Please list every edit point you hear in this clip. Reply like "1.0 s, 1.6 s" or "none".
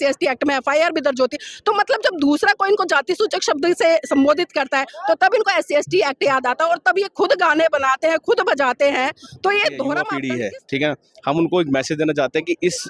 10.1 s